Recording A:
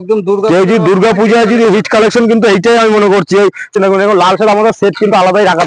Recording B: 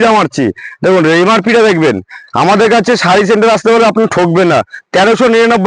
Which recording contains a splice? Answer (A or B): A